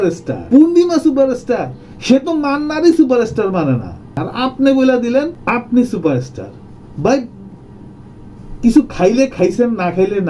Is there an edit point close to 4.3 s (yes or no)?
yes